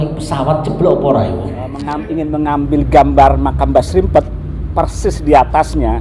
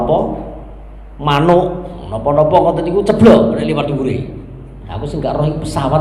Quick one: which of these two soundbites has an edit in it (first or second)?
first